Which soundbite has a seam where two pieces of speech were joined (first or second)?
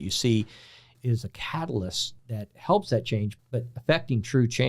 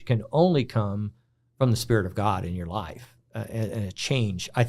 first